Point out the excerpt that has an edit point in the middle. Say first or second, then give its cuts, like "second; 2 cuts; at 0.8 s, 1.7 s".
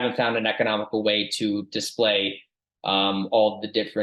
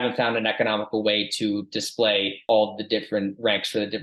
second; 1 cut; at 2.4 s